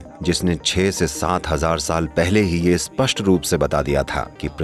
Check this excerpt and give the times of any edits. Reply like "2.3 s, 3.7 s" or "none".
none